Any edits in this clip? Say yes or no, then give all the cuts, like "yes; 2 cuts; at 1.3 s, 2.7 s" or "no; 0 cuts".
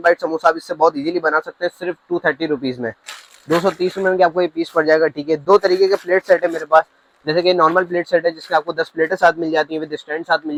no; 0 cuts